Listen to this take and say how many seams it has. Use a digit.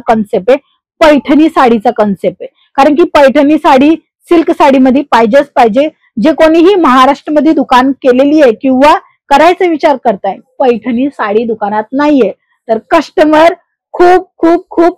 0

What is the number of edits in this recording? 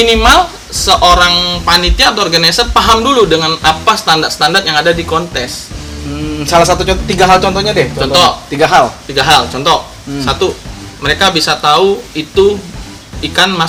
0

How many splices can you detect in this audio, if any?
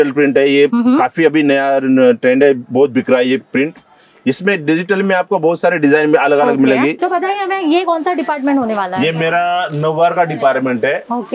1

